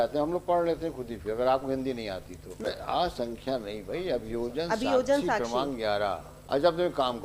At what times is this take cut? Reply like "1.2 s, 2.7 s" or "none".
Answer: 2.7 s, 6.3 s